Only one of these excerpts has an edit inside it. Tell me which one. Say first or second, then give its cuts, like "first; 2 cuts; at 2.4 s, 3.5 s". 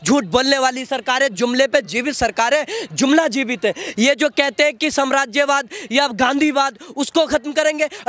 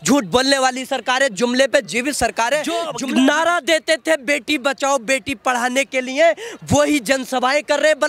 second; 1 cut; at 2.9 s